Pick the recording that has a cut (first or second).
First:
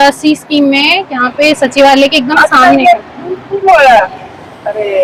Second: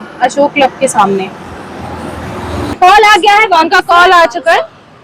second